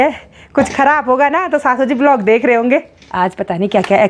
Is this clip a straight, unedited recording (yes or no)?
no